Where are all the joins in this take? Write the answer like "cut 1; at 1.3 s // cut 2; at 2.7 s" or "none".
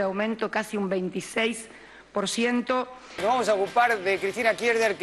cut 1; at 3.0 s